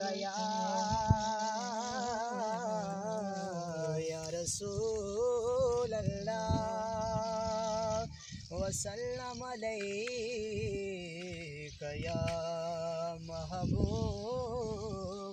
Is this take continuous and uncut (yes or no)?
yes